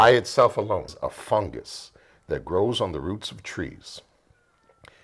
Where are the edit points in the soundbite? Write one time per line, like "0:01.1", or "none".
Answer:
0:00.9